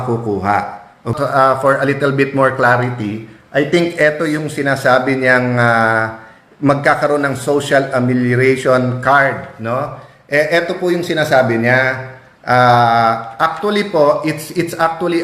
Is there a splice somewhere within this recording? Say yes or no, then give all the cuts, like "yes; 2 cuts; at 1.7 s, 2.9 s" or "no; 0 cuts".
yes; 1 cut; at 1.1 s